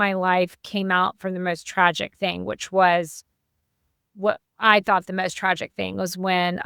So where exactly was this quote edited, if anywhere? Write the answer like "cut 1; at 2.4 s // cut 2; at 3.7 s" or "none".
none